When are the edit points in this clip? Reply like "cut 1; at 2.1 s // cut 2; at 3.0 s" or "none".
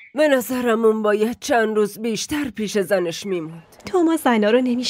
cut 1; at 3.6 s